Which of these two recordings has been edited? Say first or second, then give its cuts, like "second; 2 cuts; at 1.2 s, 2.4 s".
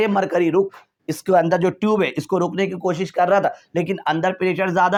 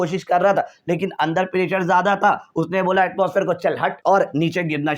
second; 1 cut; at 4.0 s